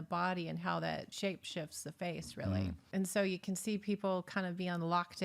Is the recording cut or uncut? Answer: cut